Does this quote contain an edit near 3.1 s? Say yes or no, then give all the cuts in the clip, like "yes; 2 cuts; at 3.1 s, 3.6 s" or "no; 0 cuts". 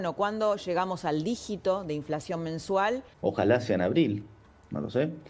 yes; 1 cut; at 3.1 s